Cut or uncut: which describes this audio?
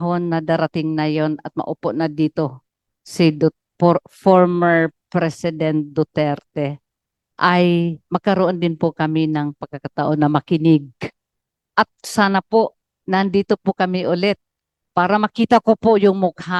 uncut